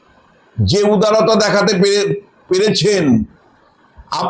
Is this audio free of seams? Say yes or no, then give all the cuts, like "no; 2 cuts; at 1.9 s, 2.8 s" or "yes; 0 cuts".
yes; 0 cuts